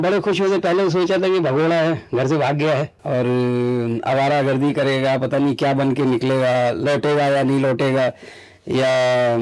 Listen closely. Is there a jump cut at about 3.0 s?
yes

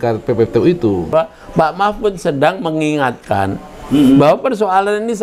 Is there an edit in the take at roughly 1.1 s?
yes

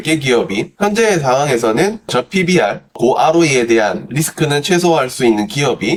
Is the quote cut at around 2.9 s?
no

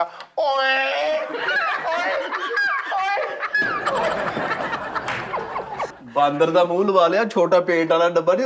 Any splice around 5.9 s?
yes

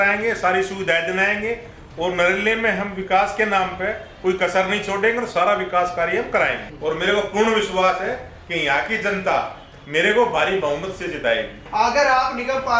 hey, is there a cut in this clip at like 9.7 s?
yes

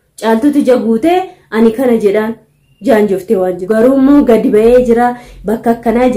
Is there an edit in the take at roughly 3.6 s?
yes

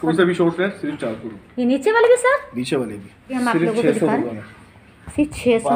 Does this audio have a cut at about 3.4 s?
yes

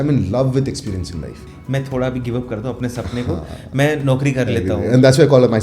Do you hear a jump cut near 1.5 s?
yes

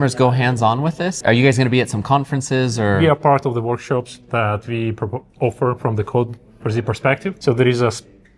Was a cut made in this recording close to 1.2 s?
yes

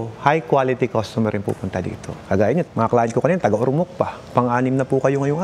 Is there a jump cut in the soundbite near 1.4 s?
no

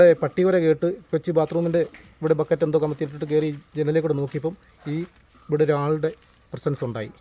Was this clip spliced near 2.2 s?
no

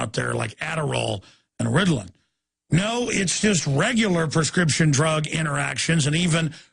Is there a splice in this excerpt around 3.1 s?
yes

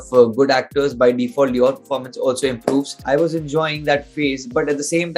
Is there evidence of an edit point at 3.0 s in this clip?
yes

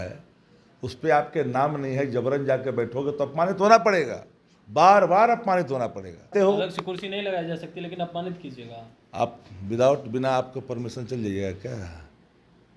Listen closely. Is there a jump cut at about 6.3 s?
yes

